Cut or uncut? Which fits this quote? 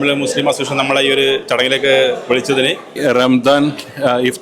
cut